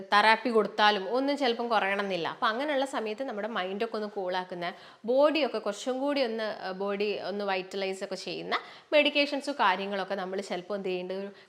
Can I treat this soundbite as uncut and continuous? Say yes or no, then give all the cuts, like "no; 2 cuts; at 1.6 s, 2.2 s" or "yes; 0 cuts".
yes; 0 cuts